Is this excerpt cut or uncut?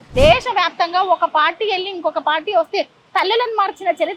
uncut